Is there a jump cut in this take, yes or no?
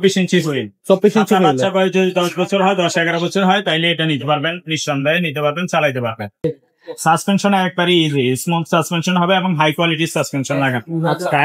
yes